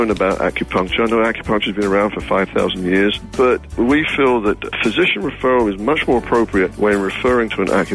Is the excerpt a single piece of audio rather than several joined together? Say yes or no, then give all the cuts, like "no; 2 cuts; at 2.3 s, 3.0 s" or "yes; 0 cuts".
no; 3 cuts; at 3.7 s, 4.7 s, 6.7 s